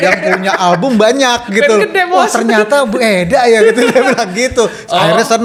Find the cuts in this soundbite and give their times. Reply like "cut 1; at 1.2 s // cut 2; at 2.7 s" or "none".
none

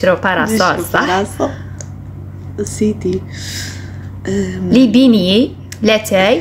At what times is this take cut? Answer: none

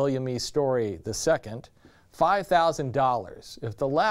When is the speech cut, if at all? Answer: cut 1; at 3.2 s

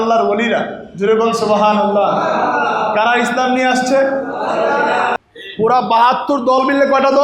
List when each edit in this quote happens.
cut 1; at 5.2 s

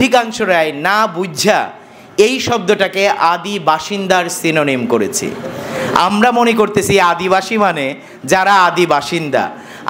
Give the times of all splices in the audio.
none

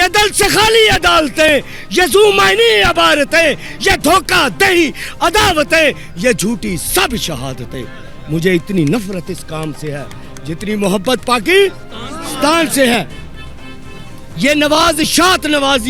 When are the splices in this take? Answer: none

